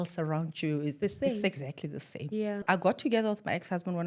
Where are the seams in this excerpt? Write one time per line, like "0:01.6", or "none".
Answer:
0:02.6